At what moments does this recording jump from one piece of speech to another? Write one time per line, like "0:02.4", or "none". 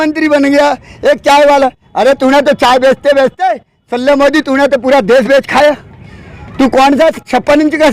none